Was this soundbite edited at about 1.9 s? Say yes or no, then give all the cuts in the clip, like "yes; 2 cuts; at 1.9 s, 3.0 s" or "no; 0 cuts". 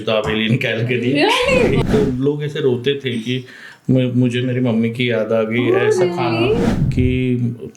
yes; 2 cuts; at 1.9 s, 6.8 s